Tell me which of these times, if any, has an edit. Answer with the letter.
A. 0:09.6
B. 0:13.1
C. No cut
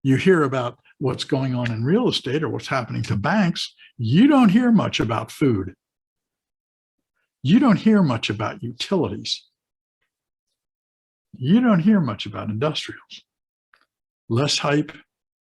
B